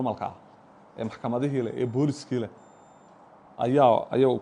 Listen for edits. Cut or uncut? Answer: uncut